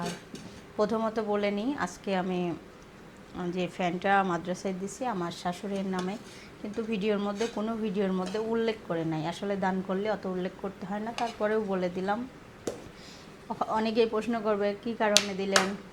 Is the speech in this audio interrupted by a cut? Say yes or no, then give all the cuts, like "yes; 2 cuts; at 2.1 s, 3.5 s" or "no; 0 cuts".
no; 0 cuts